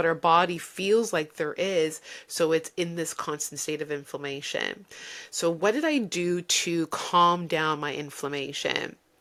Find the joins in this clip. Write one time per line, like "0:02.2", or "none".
none